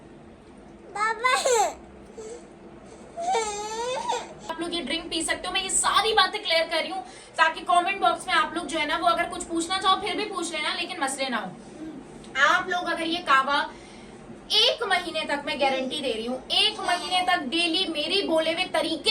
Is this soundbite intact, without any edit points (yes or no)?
no